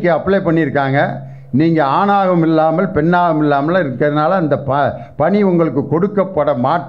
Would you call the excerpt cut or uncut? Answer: uncut